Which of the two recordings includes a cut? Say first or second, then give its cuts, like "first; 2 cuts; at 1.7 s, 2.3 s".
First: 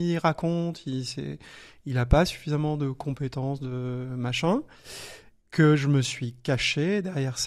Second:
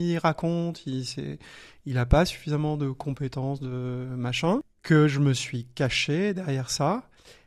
second; 1 cut; at 4.7 s